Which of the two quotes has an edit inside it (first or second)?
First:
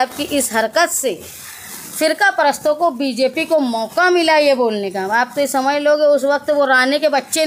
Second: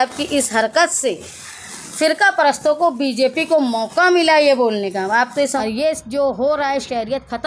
second